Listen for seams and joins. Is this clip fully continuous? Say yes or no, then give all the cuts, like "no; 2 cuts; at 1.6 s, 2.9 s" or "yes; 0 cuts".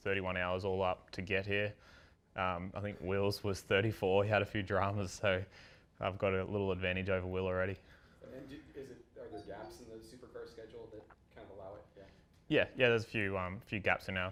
yes; 0 cuts